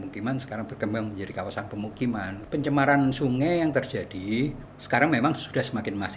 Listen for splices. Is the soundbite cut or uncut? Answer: cut